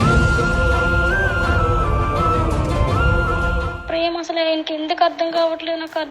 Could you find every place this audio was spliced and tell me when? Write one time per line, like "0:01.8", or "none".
0:03.8